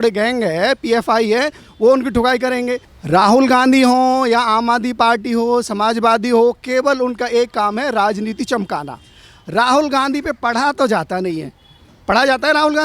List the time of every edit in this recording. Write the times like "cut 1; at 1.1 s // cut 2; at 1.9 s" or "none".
cut 1; at 2.9 s